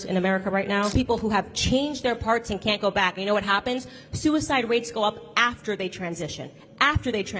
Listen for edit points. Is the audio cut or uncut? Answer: cut